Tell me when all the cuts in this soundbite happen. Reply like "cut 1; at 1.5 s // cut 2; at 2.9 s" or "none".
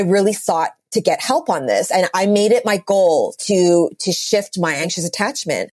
cut 1; at 4.9 s